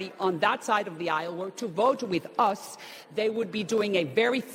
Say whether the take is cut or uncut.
uncut